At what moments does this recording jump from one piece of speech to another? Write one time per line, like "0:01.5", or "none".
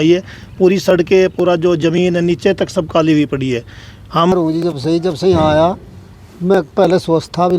0:04.3